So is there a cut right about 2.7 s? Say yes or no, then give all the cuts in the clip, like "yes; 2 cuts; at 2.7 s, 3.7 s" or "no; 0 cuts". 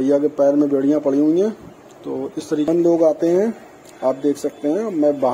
yes; 1 cut; at 2.7 s